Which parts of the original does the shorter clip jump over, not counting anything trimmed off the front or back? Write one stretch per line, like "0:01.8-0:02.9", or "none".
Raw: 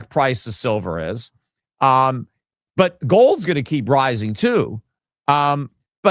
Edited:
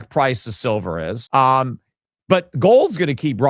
0:01.1-0:01.6